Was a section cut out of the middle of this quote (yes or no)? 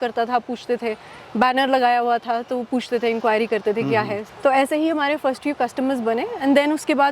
yes